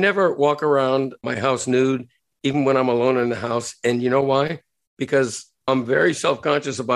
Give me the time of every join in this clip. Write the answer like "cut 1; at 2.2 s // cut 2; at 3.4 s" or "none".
cut 1; at 1.2 s